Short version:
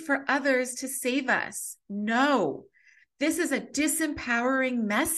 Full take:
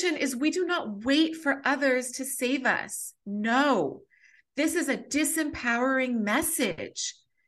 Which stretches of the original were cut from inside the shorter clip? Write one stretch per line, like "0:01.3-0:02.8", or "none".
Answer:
none